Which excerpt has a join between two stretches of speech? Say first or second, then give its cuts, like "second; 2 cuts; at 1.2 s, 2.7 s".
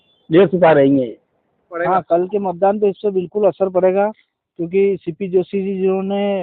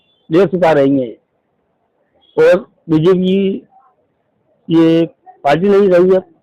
first; 1 cut; at 1.7 s